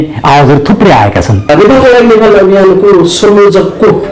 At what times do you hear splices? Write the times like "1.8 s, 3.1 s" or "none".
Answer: 1.5 s